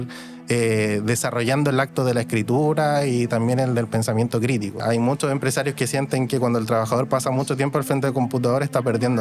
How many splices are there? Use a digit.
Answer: 1